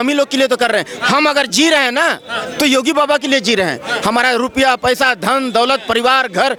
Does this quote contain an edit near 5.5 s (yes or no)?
no